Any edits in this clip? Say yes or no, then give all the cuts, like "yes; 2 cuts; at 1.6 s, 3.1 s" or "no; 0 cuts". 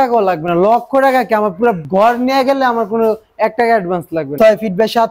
yes; 2 cuts; at 1.8 s, 4.3 s